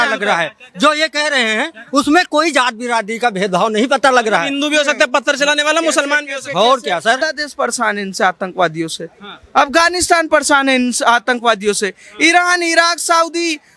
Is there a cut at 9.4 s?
no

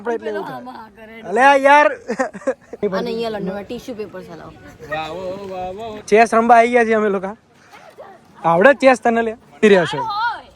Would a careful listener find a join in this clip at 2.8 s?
yes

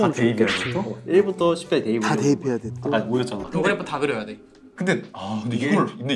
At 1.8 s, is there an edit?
no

